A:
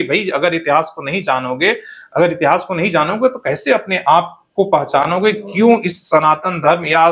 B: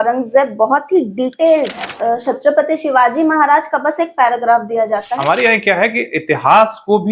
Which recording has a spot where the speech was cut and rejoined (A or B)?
B